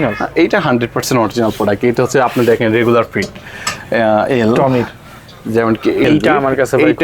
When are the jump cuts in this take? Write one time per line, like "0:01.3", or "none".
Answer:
0:06.1